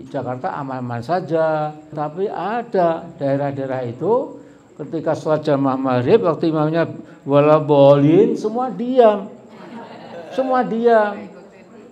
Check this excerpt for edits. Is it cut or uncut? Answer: cut